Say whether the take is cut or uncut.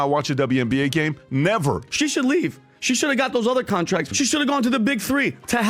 cut